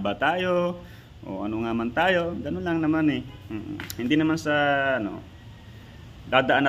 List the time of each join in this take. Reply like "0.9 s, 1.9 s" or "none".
none